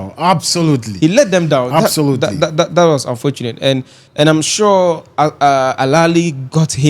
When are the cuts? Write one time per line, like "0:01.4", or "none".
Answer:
0:04.0